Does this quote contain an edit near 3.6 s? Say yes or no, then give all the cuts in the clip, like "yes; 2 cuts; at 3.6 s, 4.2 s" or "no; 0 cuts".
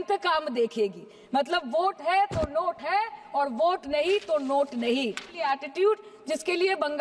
no; 1 cut; at 5.3 s